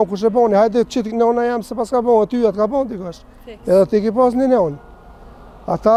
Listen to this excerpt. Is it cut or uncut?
uncut